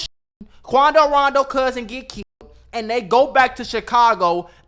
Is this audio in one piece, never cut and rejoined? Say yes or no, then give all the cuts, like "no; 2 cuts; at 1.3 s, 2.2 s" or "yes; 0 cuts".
yes; 0 cuts